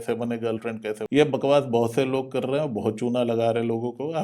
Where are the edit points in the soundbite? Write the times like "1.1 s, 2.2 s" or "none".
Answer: 1.0 s